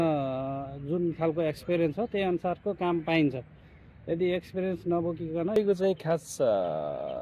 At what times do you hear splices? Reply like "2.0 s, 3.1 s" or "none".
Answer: 5.6 s